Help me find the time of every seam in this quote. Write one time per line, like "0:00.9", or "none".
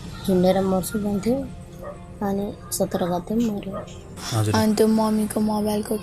0:04.2